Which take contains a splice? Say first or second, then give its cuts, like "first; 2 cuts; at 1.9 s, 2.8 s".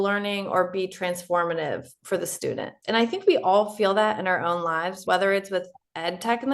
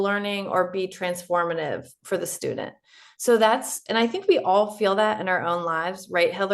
first; 2 cuts; at 2.7 s, 5.0 s